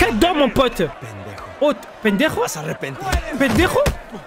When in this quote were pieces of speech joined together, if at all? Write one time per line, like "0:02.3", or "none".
0:01.1